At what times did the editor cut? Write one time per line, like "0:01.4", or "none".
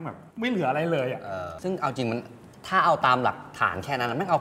0:01.5